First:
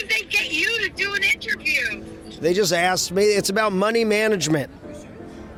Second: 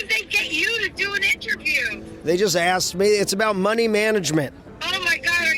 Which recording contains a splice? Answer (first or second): second